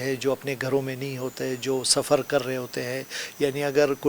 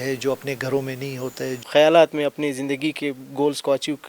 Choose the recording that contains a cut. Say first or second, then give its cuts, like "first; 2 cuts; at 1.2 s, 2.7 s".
second; 1 cut; at 1.6 s